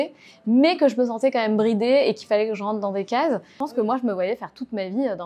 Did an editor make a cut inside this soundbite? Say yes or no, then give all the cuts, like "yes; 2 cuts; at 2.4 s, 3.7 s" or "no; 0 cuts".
yes; 1 cut; at 3.6 s